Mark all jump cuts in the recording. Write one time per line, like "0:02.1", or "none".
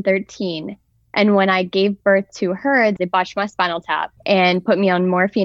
0:03.0
0:04.1